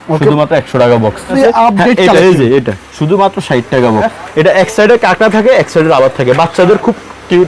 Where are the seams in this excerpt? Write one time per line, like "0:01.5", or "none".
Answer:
0:01.3
0:04.2